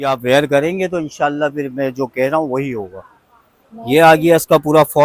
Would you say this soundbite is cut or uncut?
uncut